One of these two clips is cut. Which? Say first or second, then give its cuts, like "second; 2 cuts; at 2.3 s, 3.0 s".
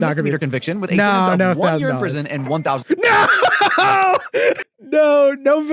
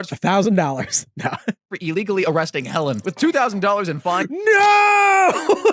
first; 1 cut; at 4.6 s